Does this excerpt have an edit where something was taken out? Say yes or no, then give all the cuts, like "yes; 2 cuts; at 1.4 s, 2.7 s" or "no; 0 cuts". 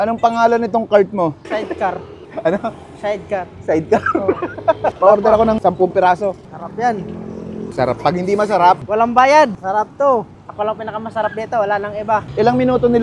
no; 0 cuts